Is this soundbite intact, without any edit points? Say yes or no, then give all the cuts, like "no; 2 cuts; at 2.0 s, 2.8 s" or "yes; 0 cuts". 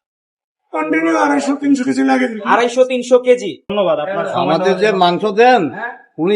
no; 1 cut; at 3.7 s